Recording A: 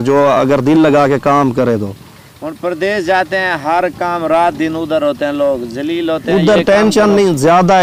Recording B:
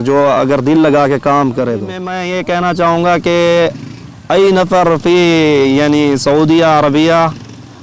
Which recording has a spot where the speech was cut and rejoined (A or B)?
B